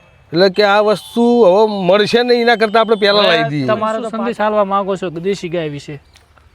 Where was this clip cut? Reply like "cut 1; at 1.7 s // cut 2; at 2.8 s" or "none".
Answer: cut 1; at 4.1 s